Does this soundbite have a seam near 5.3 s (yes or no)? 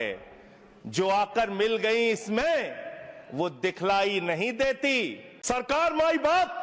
yes